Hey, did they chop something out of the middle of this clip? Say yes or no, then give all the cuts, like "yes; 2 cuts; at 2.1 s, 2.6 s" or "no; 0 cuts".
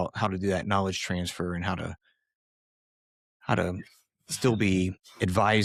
no; 0 cuts